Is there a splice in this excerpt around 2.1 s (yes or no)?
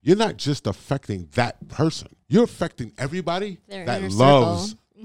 yes